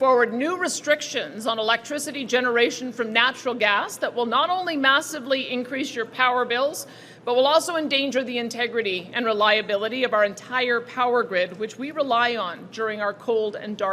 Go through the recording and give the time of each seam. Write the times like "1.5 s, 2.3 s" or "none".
none